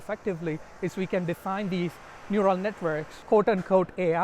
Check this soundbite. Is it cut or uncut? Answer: cut